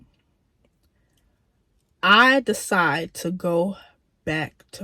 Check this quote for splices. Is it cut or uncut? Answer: uncut